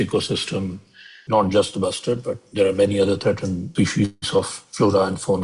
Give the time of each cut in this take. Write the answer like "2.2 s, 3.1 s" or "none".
1.2 s, 3.7 s